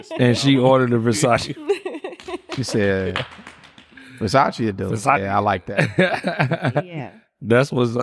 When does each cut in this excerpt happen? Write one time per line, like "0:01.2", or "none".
none